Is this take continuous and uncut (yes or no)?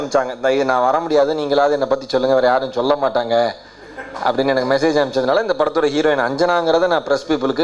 yes